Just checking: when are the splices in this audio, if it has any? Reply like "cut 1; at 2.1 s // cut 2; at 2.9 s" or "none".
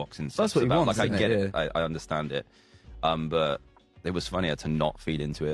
none